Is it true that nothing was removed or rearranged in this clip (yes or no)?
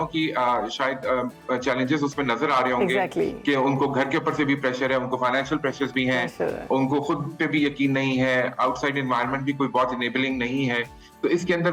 yes